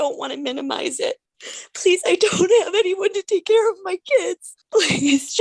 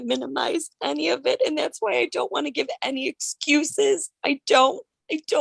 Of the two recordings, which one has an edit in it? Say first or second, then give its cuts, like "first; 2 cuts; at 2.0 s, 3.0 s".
first; 2 cuts; at 1.3 s, 4.5 s